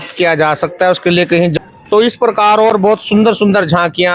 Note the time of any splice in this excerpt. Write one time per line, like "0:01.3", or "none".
0:01.5

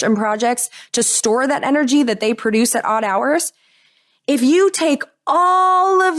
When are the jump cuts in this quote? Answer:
none

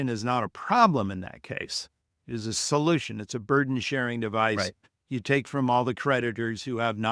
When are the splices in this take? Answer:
none

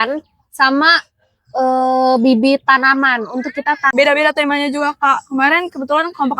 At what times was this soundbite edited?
0:03.9

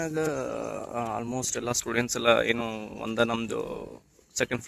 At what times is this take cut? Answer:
none

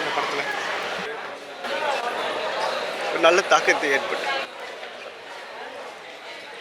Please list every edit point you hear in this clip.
0:01.0

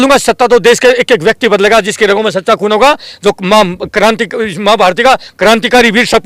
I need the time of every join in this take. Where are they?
none

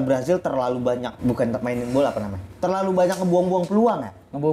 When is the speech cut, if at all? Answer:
0:01.1

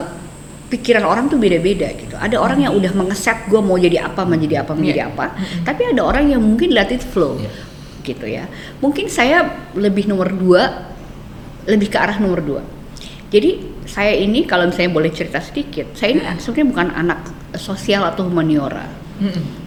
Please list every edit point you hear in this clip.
none

